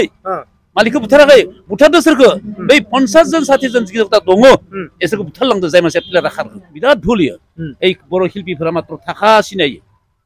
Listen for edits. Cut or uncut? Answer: cut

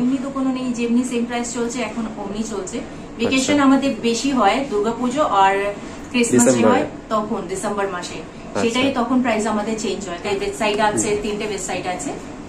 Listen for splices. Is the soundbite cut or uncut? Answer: uncut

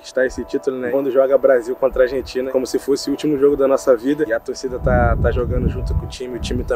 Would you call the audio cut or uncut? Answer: cut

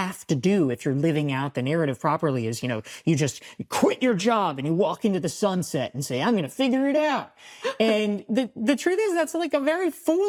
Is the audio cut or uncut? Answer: uncut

